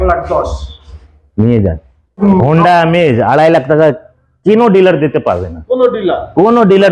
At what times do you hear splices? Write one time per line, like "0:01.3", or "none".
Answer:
0:02.2

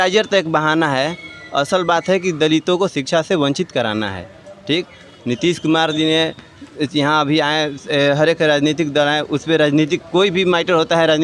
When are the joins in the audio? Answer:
none

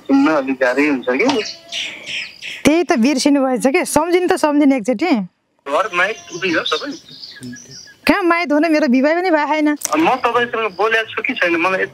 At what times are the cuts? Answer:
0:05.5
0:09.8

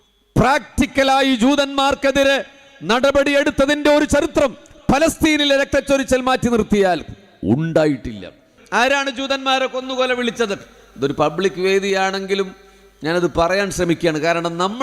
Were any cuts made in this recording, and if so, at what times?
0:08.5

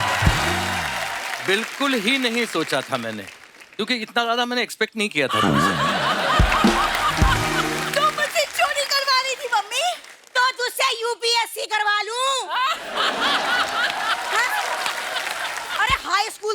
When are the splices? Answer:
0:07.8
0:15.6

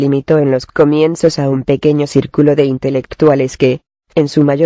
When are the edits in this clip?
0:01.9

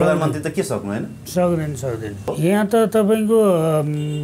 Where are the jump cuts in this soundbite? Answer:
0:02.2

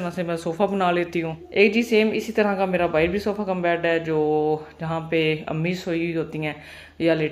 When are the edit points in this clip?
none

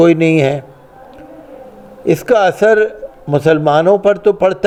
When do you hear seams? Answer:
none

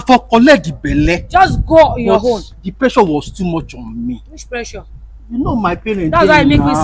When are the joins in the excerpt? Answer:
none

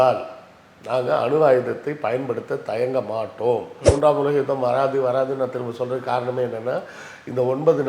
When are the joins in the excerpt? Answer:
0:03.7

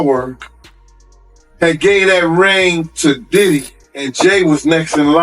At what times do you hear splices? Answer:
0:04.1

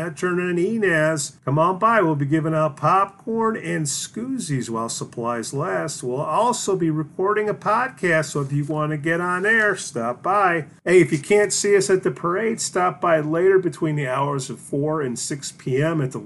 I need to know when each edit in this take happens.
0:01.3
0:10.7

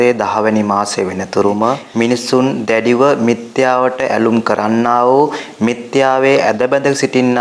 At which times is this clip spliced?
0:01.8

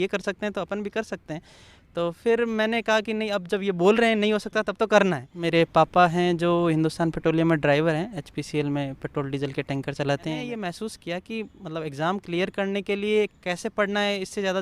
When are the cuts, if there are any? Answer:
0:05.3
0:10.4

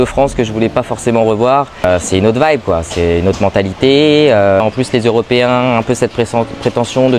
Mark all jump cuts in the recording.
0:01.8
0:04.6

